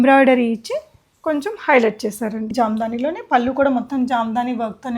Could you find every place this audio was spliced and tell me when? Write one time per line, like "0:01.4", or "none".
0:02.5